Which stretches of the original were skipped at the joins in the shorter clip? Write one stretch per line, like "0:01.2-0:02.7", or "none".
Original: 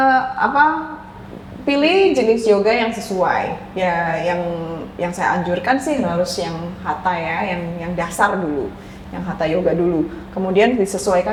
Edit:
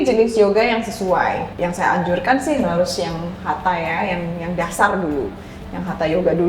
0:03.6-0:04.9